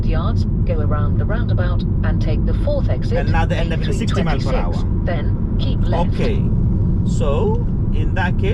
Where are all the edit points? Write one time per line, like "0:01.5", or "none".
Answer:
none